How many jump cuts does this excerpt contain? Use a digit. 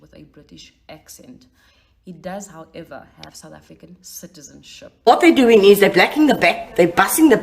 1